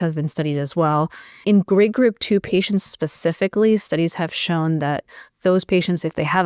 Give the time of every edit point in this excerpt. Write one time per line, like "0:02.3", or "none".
none